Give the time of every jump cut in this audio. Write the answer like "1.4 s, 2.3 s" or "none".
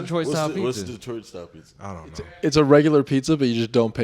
2.5 s